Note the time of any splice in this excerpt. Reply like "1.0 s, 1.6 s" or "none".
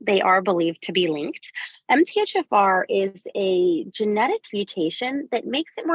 none